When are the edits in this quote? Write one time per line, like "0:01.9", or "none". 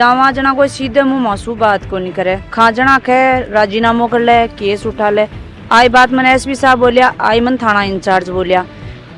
none